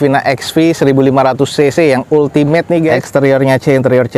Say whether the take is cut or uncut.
cut